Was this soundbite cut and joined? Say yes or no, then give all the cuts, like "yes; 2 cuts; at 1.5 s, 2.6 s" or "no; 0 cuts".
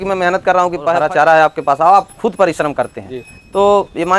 yes; 1 cut; at 1.0 s